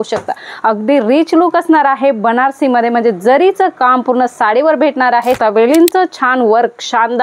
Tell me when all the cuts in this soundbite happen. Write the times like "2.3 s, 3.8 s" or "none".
5.4 s